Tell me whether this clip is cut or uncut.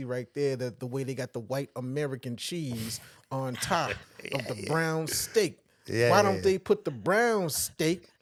uncut